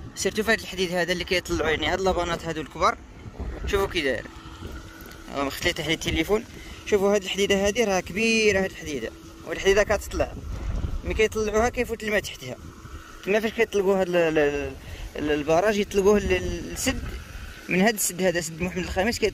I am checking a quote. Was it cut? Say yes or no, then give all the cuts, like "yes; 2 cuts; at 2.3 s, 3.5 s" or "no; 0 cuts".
no; 0 cuts